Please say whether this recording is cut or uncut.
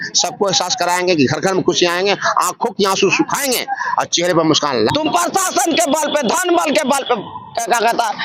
cut